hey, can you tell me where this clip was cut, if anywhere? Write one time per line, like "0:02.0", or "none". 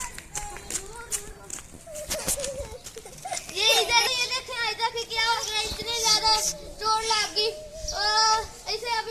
none